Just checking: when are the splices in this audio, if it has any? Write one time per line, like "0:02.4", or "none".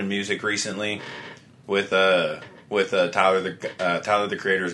none

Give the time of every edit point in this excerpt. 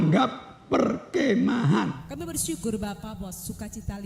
0:02.0

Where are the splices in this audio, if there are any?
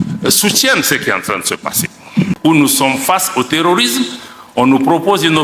0:02.3

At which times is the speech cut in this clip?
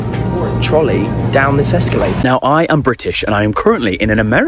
0:02.2

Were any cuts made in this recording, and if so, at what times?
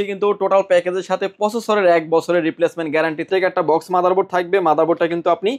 0:03.3

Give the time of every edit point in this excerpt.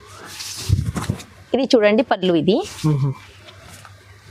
none

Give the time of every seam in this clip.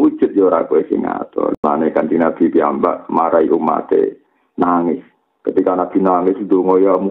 0:01.6

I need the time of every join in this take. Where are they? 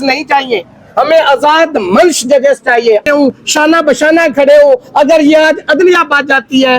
0:03.0

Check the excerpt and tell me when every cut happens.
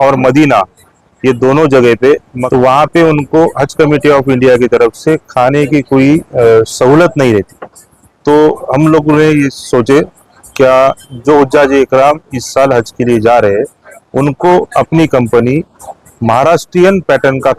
0:02.3

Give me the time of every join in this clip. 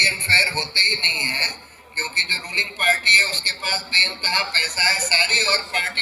none

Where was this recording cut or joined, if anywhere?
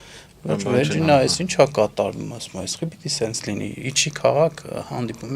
none

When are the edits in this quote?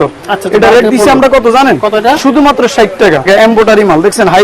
0:03.3

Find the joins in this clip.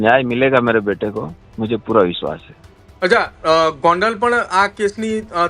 none

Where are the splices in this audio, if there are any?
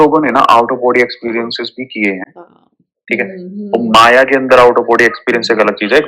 none

